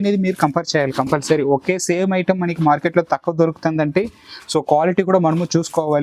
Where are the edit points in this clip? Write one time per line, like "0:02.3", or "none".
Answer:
none

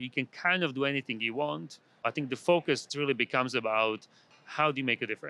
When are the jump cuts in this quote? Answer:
0:02.0
0:02.9

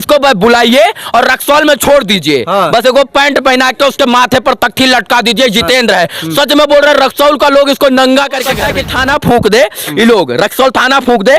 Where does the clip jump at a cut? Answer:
0:08.5

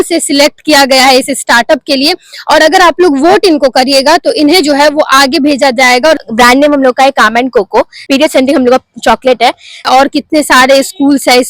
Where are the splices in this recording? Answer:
0:06.2
0:08.0
0:09.9

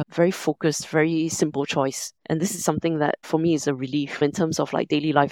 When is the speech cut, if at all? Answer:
none

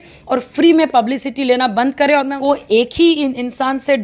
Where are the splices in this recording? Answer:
0:02.3

